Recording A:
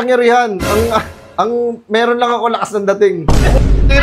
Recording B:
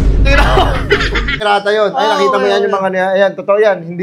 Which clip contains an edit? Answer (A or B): B